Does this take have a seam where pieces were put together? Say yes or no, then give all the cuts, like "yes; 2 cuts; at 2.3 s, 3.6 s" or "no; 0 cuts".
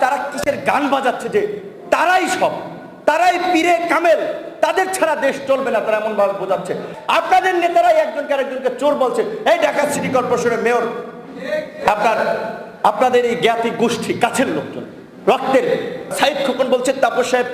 yes; 2 cuts; at 6.9 s, 16.1 s